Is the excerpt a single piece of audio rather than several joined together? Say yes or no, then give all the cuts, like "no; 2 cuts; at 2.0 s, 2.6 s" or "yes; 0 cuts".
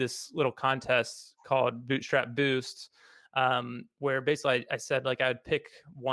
yes; 0 cuts